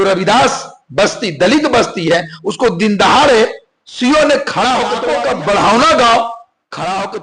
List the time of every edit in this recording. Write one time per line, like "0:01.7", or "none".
0:05.0